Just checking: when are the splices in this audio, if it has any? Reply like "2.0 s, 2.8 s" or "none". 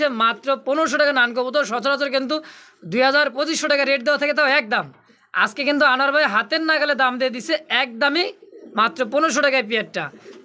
none